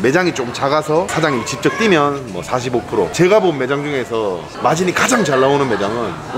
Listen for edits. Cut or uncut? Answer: uncut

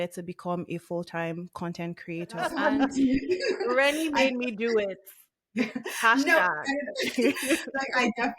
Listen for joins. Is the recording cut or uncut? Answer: cut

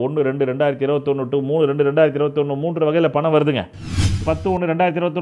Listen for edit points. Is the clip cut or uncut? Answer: cut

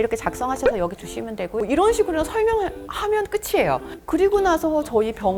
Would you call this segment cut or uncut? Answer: uncut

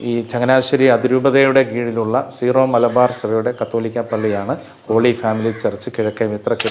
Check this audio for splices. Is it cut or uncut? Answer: uncut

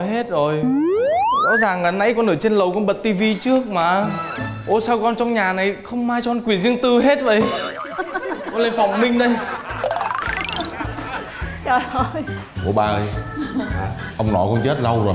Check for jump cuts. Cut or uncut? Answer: uncut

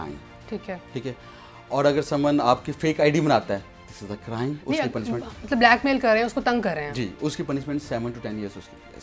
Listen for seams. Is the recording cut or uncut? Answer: uncut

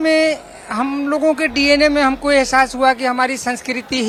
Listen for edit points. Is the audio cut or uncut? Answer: uncut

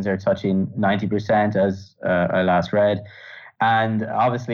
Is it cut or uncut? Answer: cut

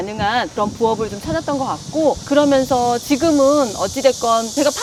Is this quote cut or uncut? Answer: uncut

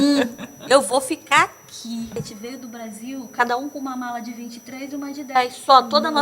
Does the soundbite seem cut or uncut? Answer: cut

